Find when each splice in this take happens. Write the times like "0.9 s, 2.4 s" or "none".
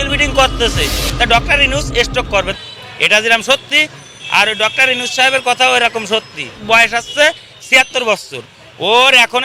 2.5 s, 6.6 s